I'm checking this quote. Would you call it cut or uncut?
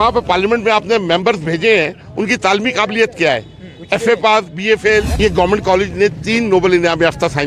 cut